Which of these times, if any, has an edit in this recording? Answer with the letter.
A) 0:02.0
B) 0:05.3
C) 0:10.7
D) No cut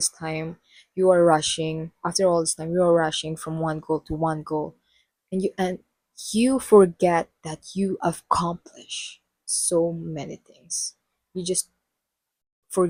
D